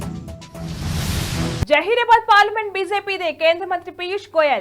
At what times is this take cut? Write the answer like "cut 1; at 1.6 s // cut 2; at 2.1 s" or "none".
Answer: cut 1; at 1.6 s

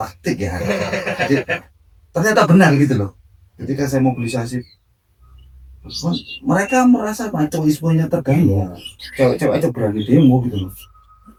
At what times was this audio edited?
none

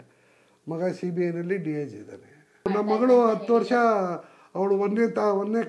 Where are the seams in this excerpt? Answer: cut 1; at 2.7 s

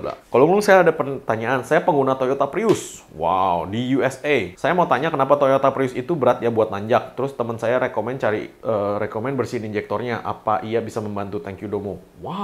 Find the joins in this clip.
none

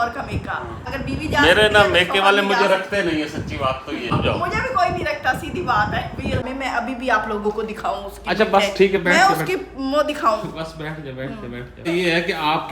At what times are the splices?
cut 1; at 0.9 s // cut 2; at 4.1 s // cut 3; at 6.4 s // cut 4; at 11.7 s

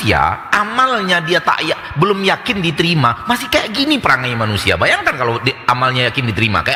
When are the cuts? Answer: none

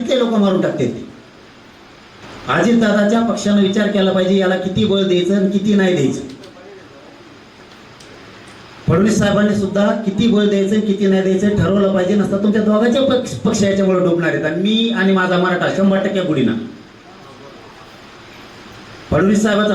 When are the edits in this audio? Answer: cut 1; at 2.2 s

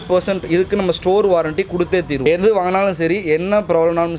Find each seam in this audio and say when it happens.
cut 1; at 2.3 s

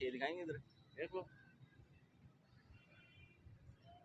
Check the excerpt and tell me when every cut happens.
none

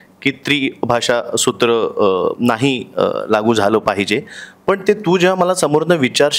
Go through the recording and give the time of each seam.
none

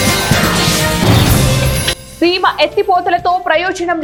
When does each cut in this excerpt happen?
none

